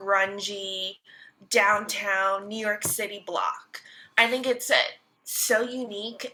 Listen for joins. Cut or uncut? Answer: uncut